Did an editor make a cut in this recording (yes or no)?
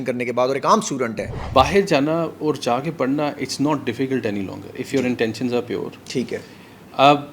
yes